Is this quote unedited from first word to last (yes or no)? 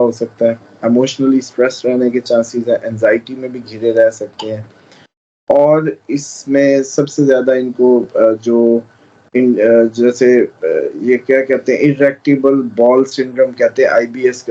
yes